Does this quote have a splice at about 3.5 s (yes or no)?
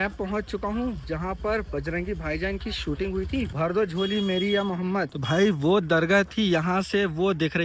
yes